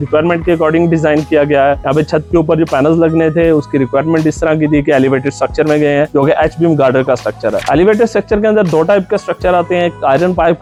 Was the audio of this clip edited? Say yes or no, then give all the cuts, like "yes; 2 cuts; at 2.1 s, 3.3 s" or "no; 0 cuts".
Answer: no; 0 cuts